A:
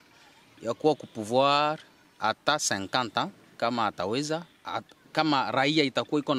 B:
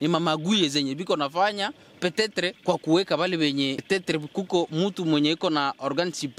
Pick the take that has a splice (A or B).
B